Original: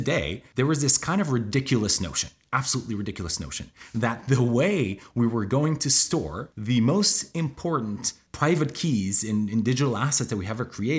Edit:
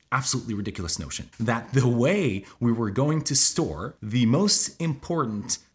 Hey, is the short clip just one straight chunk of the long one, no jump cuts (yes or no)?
no